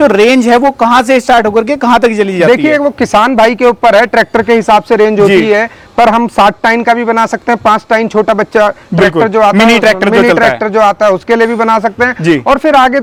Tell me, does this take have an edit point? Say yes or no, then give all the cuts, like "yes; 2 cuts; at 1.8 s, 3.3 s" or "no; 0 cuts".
no; 0 cuts